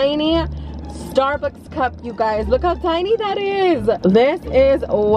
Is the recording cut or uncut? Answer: cut